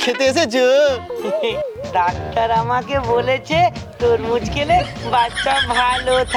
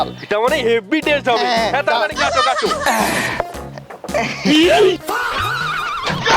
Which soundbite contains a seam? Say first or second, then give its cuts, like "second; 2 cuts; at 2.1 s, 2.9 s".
second; 1 cut; at 2.8 s